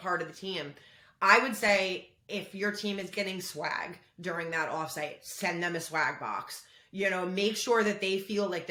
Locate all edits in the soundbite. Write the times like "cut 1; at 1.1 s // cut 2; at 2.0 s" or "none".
none